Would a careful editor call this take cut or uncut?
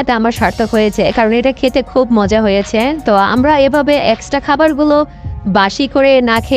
uncut